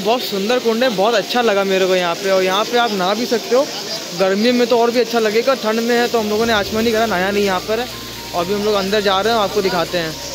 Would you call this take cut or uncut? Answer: uncut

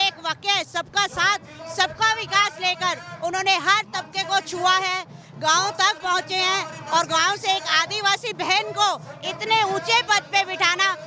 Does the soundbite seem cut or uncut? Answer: uncut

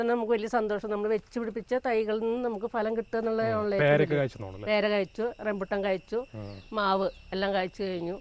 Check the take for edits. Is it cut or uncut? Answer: uncut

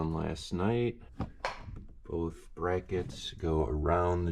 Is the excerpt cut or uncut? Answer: uncut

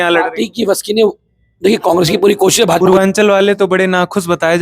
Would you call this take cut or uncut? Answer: cut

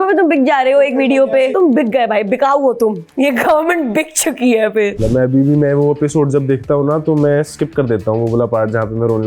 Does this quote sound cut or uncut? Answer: cut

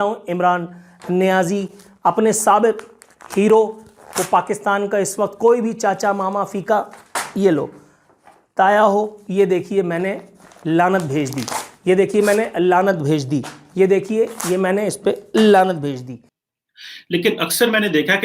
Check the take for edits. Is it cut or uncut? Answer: cut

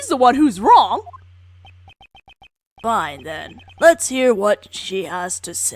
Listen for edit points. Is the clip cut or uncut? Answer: cut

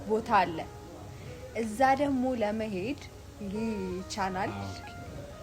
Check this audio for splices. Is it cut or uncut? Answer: uncut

